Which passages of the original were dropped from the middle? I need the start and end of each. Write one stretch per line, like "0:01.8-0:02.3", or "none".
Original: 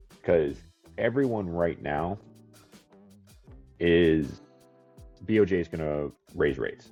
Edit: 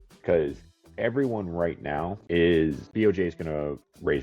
0:02.2-0:03.7
0:04.3-0:05.2

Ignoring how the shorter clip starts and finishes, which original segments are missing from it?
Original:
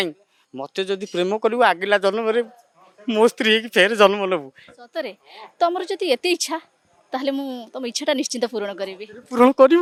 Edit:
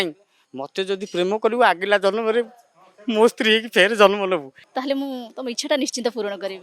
0:04.6-0:06.9

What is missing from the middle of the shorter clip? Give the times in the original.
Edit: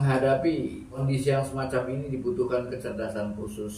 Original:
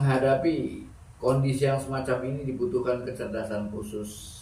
0:01.0-0:01.4

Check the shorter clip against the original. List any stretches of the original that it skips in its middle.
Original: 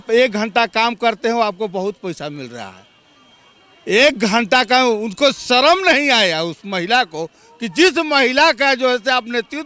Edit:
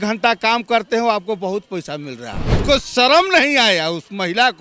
0:02.9-0:05.1

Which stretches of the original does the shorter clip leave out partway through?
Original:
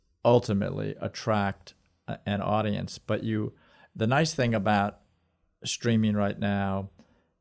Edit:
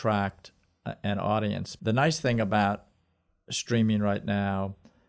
0:02.9-0:03.8

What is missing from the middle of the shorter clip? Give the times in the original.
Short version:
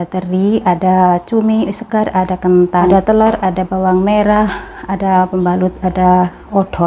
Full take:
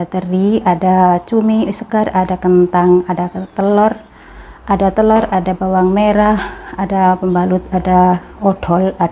0:02.9-0:04.8

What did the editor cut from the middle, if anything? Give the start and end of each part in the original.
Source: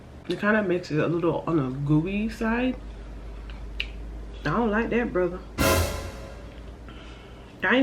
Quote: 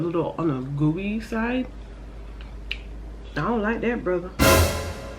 0:05.4-0:05.5

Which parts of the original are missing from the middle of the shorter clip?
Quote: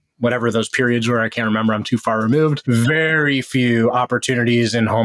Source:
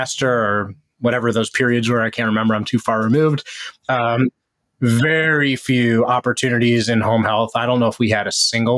0:03.4-0:04.7

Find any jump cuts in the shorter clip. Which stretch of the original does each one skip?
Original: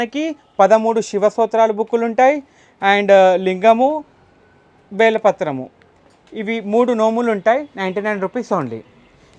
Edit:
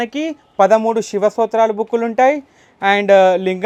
none

